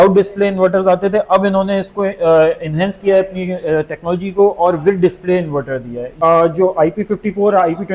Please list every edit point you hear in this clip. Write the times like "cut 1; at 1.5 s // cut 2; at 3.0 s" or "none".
cut 1; at 6.1 s